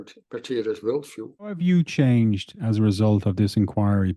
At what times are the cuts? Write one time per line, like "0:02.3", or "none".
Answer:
0:01.6